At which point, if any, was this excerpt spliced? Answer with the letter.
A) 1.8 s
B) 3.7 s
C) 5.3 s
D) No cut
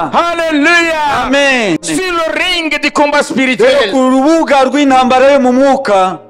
A